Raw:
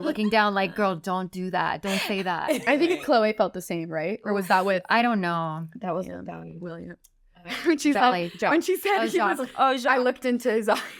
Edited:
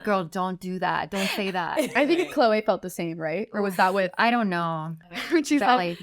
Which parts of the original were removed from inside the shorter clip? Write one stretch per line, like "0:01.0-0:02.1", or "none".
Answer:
0:05.7-0:07.3